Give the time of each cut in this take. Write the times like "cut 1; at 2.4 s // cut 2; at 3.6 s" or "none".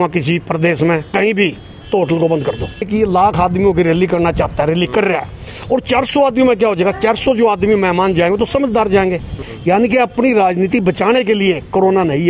cut 1; at 2.9 s // cut 2; at 9.4 s